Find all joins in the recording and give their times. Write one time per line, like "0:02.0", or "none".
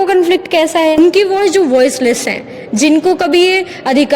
0:01.0